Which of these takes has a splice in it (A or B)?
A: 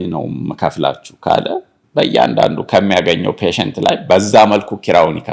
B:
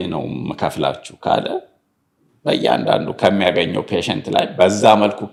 A